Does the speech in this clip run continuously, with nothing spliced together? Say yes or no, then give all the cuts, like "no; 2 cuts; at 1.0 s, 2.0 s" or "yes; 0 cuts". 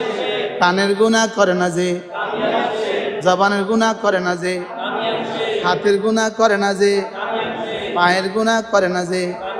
yes; 0 cuts